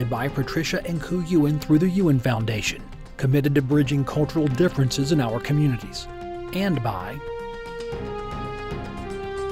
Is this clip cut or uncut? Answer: cut